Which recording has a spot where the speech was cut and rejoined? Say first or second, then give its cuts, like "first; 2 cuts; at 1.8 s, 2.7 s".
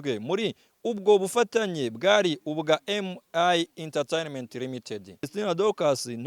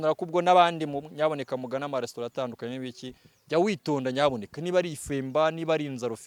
first; 1 cut; at 5.3 s